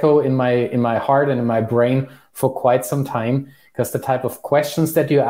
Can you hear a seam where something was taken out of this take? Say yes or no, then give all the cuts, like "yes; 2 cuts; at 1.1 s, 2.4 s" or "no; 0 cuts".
no; 0 cuts